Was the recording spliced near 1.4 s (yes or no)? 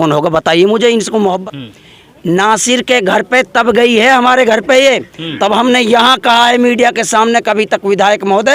yes